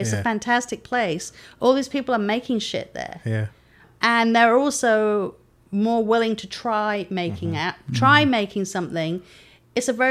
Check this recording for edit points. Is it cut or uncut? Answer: cut